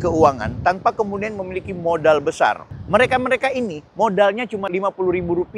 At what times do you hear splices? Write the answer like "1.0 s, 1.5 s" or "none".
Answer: 2.7 s, 4.6 s